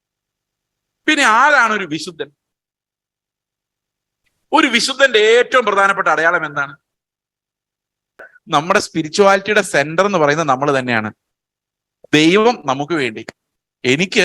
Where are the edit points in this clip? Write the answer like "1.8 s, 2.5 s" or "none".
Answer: 8.3 s

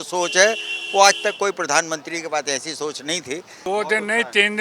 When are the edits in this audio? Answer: 3.6 s

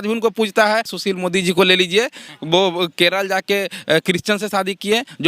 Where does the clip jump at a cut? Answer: 0.9 s

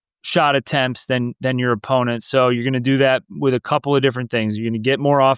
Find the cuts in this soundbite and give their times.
none

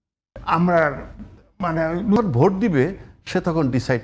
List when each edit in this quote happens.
2.2 s

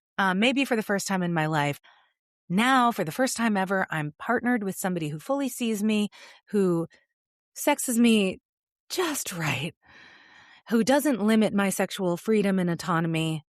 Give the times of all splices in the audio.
1.8 s

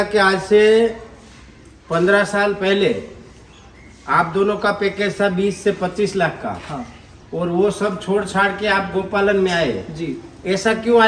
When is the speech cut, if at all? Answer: none

